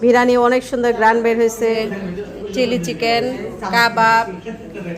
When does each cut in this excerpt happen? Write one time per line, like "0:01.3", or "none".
0:01.7